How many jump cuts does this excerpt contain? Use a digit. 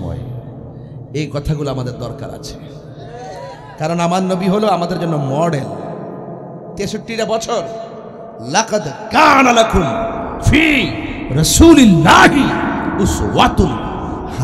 0